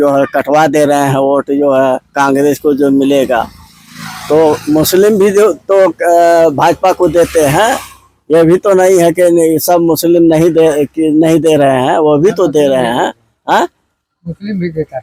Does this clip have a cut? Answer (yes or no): no